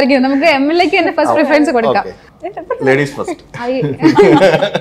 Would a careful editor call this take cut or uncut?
cut